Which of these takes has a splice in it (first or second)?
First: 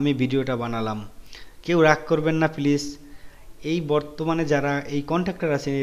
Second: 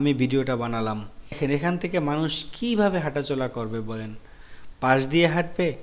second